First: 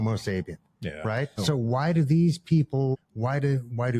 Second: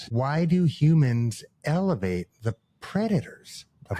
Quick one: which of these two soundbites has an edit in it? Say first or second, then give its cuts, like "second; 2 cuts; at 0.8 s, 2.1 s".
first; 2 cuts; at 1.4 s, 2.9 s